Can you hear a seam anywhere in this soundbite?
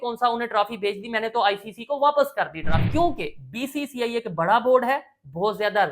yes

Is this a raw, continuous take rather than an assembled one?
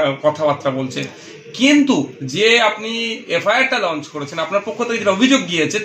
yes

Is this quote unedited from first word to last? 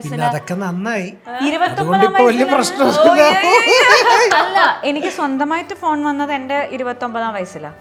yes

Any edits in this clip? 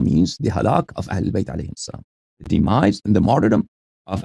no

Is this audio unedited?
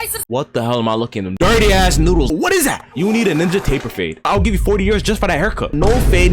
yes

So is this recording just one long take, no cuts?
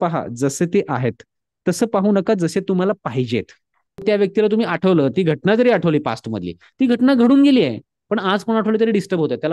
no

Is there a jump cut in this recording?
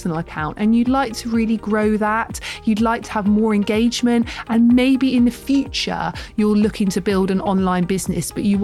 no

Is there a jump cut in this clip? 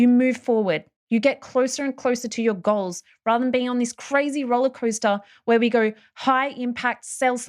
yes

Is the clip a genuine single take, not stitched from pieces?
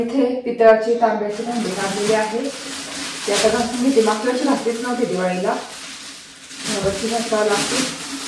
yes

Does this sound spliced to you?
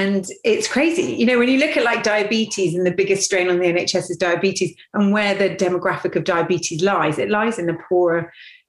no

